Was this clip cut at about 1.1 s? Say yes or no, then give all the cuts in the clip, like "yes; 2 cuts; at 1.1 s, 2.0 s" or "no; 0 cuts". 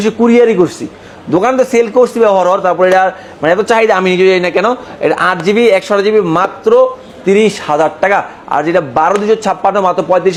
no; 0 cuts